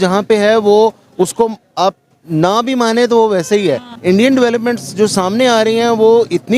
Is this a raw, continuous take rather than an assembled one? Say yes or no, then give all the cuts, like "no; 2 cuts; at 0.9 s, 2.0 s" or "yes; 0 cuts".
no; 1 cut; at 3.9 s